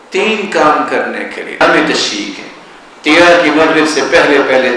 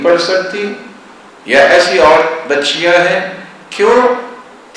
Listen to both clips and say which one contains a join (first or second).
first